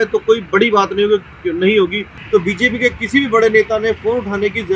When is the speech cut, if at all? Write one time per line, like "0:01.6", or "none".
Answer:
0:02.2